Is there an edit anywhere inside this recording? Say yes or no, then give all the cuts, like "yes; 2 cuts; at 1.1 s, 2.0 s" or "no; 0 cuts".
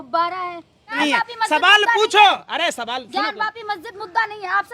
yes; 1 cut; at 1.0 s